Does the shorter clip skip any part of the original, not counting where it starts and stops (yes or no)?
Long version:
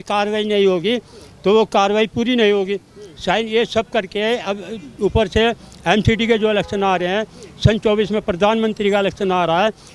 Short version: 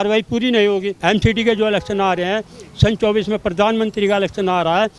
yes